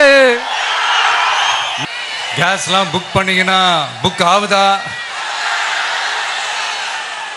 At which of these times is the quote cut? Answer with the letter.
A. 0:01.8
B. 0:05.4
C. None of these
A